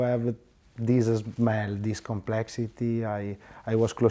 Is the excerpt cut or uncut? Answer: uncut